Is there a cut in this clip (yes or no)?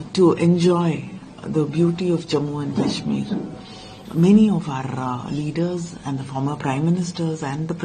yes